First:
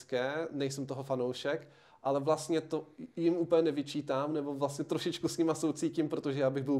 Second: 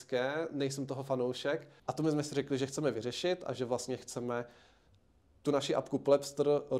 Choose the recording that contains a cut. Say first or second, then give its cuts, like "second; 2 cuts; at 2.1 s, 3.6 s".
second; 1 cut; at 1.8 s